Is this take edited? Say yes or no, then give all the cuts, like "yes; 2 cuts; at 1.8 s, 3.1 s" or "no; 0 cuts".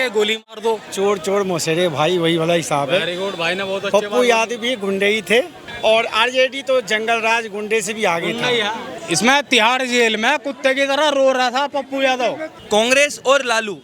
yes; 4 cuts; at 0.9 s, 5.6 s, 8.9 s, 12.5 s